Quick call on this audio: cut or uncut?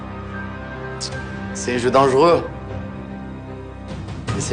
uncut